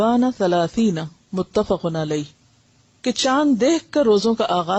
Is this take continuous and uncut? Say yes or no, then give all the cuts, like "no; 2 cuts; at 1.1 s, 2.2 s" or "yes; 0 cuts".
yes; 0 cuts